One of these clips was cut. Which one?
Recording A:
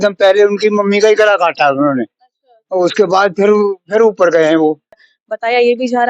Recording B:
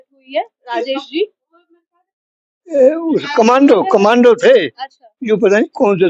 A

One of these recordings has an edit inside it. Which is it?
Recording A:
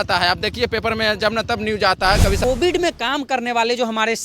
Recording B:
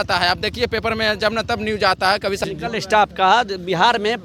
A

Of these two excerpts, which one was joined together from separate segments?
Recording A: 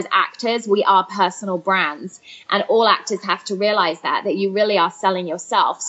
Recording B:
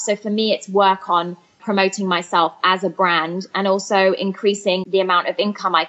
B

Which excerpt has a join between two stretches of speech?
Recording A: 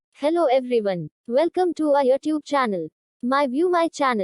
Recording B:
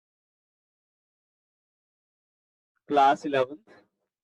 A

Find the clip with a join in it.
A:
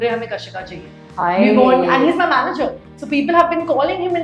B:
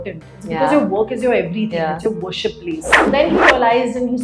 B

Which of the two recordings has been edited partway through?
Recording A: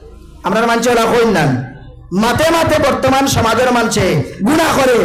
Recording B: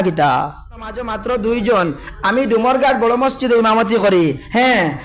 B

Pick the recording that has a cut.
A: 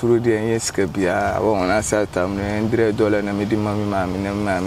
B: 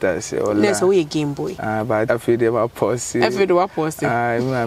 B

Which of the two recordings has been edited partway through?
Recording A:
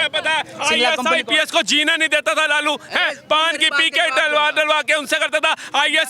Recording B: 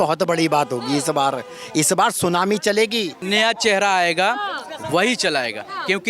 B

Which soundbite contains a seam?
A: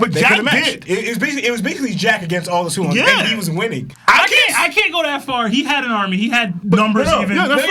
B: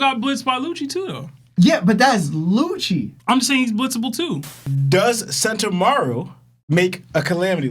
B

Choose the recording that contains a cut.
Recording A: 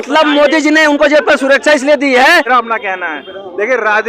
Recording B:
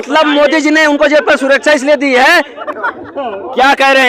A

